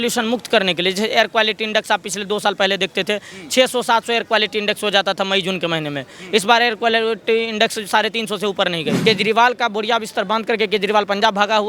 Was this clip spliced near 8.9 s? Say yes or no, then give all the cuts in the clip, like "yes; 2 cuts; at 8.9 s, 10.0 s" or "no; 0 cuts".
yes; 1 cut; at 8.9 s